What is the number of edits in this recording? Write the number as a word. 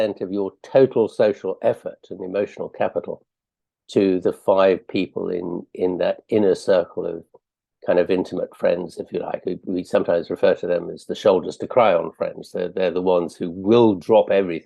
zero